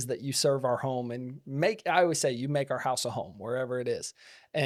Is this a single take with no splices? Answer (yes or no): yes